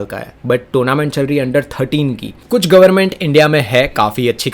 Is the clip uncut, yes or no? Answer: no